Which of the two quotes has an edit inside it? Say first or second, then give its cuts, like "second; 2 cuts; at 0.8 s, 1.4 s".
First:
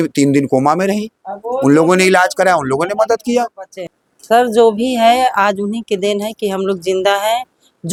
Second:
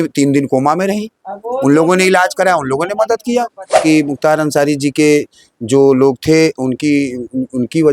second; 1 cut; at 3.8 s